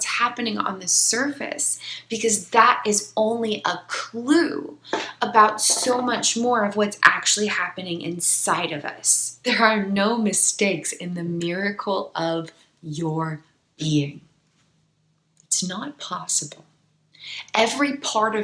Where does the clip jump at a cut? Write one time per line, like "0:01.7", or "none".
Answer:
0:09.5